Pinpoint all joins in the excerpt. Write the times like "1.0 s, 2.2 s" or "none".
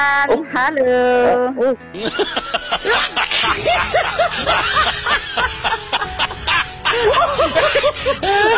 none